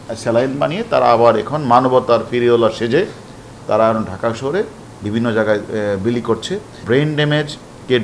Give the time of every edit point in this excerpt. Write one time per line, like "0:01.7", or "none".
0:06.7